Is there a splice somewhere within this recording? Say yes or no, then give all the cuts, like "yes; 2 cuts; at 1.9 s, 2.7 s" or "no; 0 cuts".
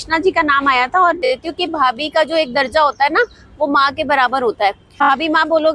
yes; 2 cuts; at 1.3 s, 5.1 s